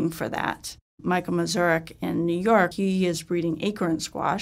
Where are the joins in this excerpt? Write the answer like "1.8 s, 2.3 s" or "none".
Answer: 1.0 s, 2.7 s